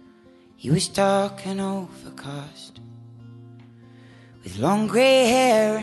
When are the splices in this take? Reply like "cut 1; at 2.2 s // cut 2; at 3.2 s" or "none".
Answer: cut 1; at 1.9 s